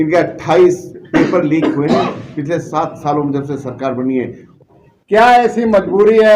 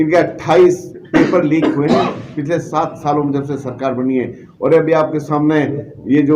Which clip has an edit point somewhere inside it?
first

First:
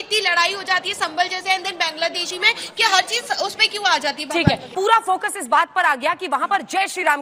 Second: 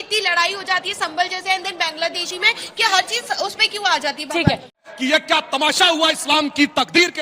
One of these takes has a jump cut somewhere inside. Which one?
second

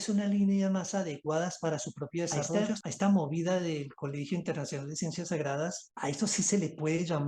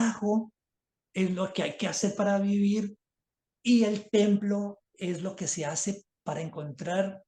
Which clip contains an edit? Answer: first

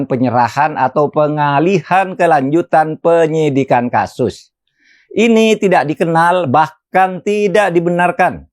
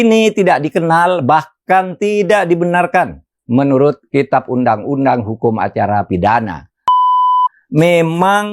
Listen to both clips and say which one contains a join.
second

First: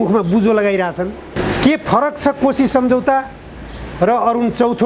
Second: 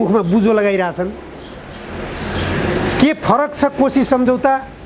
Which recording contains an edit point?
first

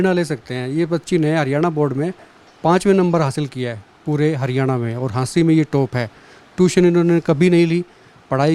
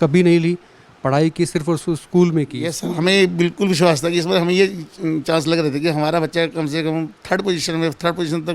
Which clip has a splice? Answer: second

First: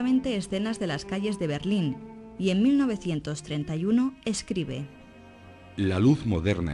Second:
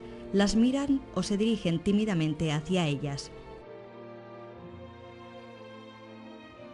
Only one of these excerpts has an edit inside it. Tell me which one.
second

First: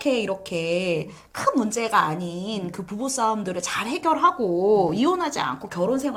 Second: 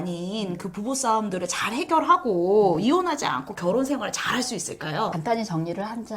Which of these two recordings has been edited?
second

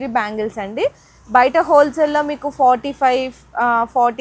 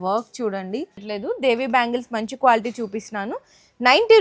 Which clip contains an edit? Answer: second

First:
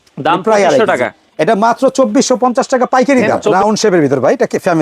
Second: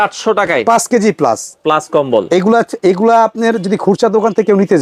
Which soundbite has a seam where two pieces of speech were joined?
first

